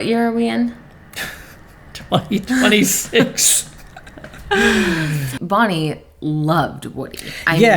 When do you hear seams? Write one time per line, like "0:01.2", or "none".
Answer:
0:05.4